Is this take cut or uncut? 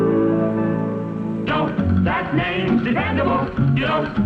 uncut